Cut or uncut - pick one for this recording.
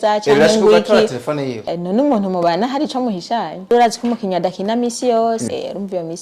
cut